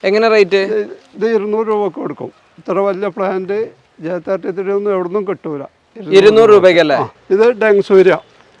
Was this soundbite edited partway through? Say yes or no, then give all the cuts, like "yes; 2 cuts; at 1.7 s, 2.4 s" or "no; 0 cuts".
yes; 1 cut; at 7.1 s